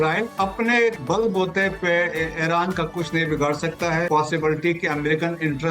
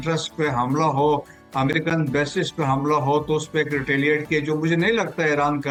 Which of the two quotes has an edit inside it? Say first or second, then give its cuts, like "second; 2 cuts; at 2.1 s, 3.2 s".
first; 2 cuts; at 1.0 s, 4.1 s